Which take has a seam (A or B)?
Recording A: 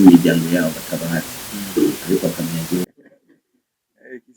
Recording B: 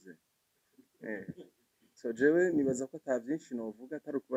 A